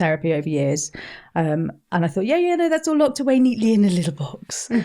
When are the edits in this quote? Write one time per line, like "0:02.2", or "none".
none